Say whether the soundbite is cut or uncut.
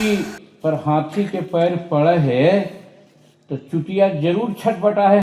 uncut